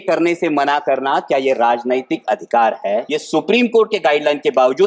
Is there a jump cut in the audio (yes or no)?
yes